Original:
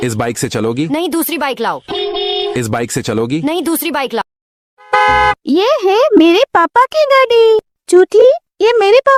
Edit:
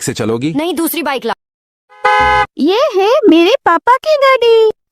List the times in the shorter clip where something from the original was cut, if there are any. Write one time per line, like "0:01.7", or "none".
0:01.3